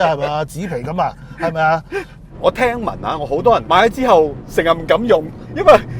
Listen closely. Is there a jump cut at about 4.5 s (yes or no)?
no